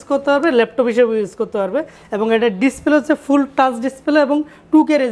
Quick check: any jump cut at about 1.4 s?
no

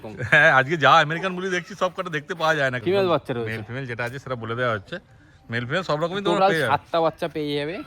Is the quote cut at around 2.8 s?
yes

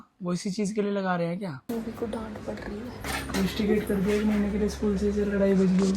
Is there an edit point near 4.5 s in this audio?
no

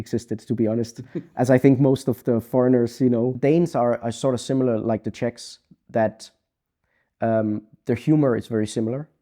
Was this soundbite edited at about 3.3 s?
yes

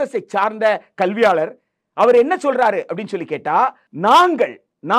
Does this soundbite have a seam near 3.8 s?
yes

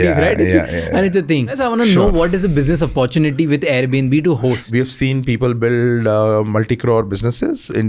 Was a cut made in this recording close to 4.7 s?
yes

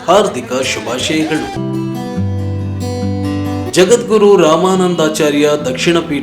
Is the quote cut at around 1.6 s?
yes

